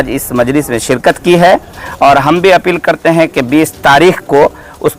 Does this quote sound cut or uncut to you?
uncut